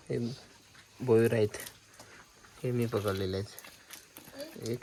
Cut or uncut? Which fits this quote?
uncut